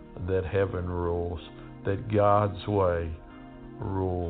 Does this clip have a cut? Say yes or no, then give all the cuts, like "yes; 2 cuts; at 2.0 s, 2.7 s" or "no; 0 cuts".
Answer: no; 0 cuts